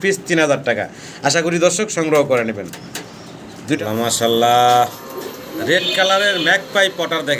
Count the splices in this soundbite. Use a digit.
1